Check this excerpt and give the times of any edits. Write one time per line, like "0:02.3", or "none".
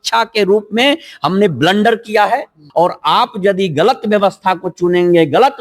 0:02.6